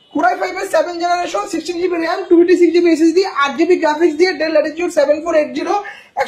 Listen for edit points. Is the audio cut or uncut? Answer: uncut